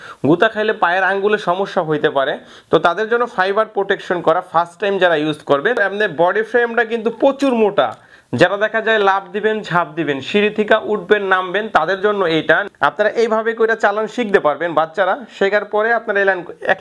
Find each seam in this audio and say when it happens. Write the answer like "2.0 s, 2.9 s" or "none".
5.8 s, 12.7 s